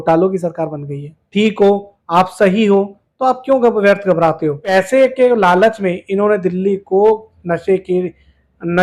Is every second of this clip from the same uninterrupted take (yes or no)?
no